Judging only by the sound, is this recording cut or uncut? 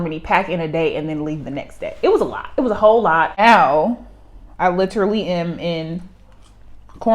cut